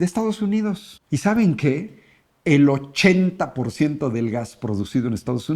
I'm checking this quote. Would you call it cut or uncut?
cut